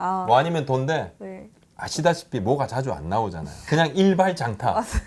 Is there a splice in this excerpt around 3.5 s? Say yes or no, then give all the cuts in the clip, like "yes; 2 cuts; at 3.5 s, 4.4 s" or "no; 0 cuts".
yes; 1 cut; at 3.5 s